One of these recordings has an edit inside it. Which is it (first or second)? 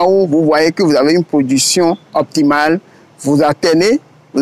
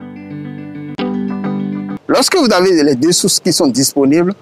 second